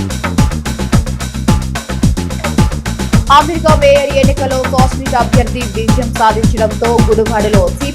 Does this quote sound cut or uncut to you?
cut